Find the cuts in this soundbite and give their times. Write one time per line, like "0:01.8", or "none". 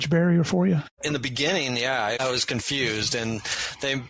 0:00.9
0:02.2